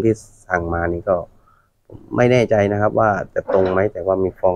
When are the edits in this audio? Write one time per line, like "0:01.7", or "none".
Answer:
none